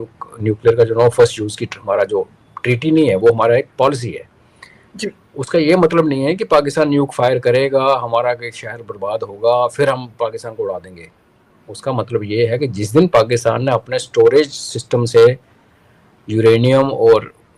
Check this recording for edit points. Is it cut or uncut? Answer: uncut